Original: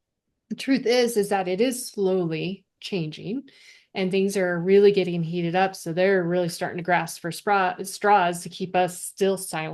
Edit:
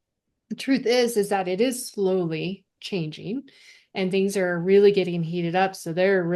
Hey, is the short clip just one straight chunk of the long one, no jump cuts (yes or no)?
yes